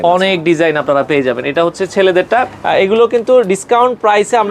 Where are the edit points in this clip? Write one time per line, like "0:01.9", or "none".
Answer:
0:02.6